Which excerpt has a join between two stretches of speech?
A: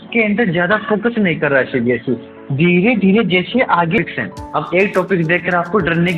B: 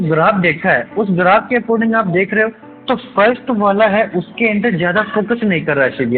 A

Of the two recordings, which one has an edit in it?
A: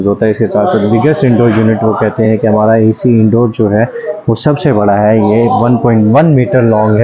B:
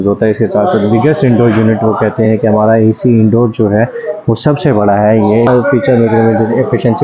B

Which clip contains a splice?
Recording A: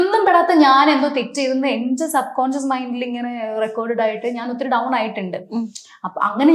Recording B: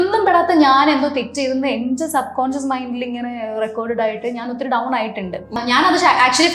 B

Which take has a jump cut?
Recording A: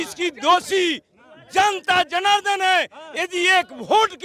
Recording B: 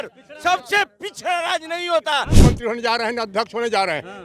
B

